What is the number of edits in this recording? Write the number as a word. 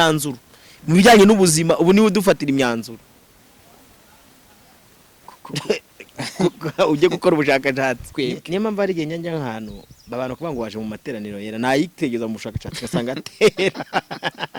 one